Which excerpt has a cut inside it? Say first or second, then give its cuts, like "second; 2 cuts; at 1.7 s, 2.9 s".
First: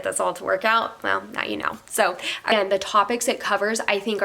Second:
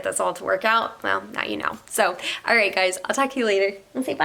first; 1 cut; at 2.5 s